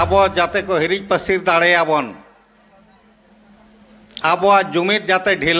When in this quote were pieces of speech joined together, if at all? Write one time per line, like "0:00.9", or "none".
none